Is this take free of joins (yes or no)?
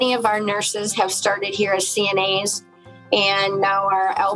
yes